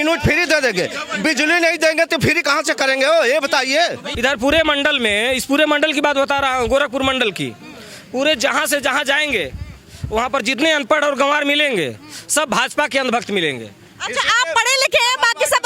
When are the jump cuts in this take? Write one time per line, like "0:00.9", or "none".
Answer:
0:04.1